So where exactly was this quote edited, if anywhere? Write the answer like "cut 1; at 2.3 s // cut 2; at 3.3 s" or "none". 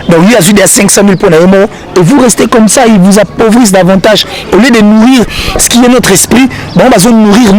none